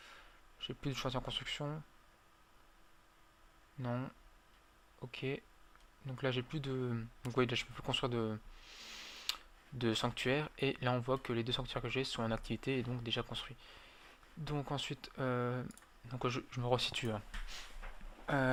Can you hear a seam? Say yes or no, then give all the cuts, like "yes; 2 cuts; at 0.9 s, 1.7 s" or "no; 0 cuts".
no; 0 cuts